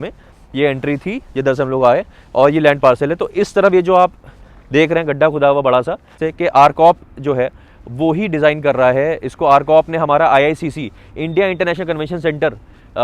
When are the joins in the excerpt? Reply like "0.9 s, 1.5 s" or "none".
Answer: 6.2 s